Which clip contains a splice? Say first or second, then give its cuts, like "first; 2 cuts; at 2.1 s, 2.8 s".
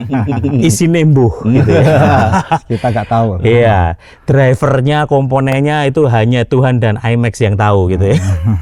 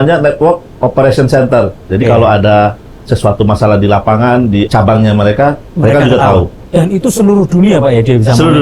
second; 4 cuts; at 1.8 s, 4.7 s, 5.7 s, 6.6 s